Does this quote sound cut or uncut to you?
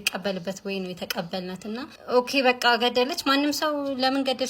cut